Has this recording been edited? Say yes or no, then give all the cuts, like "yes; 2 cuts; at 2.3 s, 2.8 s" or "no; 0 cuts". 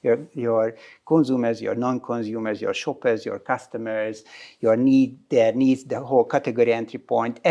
no; 0 cuts